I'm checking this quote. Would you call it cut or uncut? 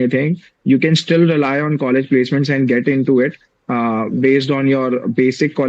uncut